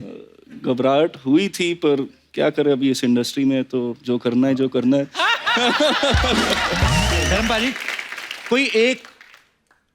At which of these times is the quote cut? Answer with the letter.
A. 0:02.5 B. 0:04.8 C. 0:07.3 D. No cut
C